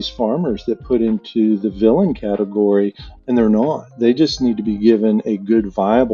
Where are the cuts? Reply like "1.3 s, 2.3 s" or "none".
none